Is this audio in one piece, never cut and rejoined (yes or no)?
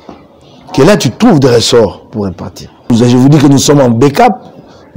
no